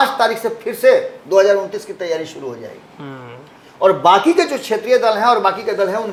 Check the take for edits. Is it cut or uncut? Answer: uncut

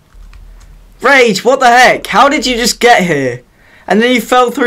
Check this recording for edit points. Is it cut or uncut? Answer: uncut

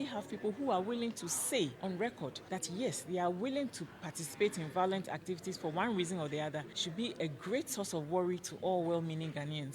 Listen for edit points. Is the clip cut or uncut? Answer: cut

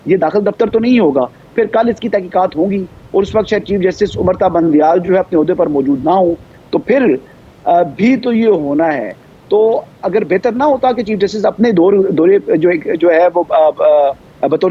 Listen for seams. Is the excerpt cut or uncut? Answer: uncut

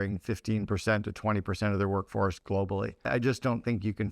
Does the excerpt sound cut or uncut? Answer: cut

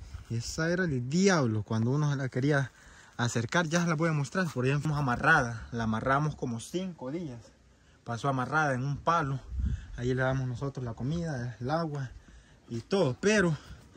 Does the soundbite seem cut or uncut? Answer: cut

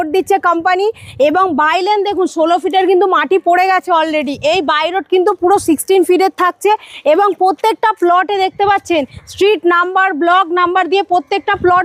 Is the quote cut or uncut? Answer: uncut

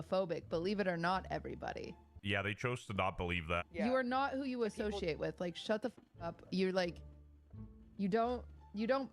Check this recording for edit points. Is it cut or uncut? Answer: cut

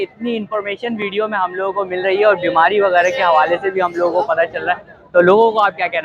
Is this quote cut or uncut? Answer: uncut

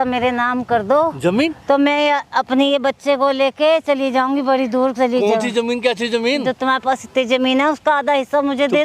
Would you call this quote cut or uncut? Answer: uncut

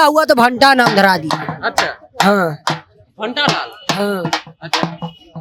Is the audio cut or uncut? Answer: uncut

